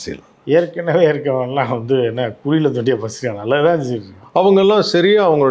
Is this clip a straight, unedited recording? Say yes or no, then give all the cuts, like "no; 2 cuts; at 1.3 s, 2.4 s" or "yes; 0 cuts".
yes; 0 cuts